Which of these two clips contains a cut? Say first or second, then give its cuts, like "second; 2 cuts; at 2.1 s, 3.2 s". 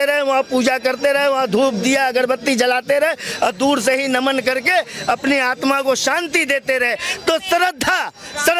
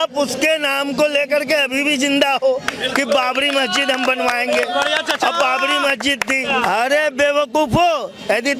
second; 1 cut; at 6.5 s